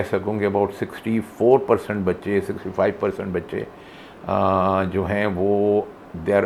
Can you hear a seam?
no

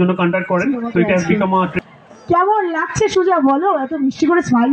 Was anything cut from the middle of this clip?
yes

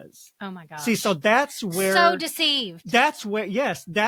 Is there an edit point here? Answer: no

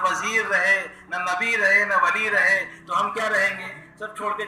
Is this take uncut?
yes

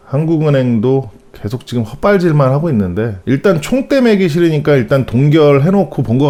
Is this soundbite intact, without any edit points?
yes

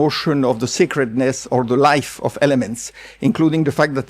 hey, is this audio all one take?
yes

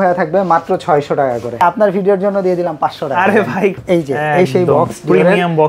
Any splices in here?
yes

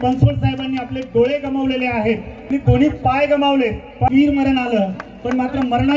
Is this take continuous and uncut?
no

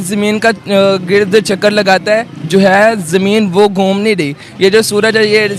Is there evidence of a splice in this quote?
no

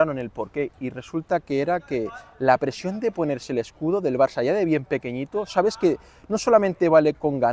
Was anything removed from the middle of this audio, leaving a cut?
no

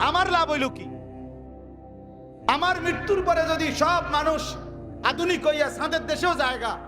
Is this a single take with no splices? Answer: no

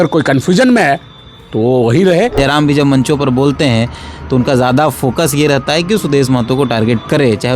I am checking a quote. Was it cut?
yes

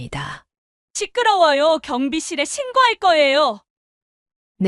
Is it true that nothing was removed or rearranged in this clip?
no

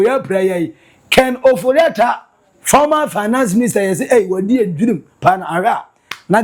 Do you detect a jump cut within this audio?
no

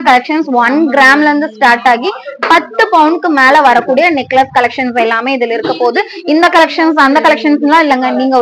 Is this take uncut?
yes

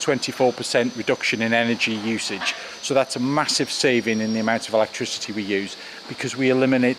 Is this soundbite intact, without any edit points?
no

